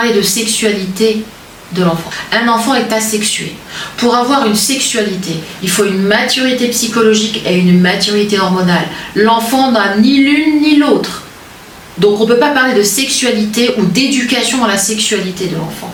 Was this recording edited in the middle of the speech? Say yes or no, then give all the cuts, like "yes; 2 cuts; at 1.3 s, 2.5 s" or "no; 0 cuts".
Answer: no; 0 cuts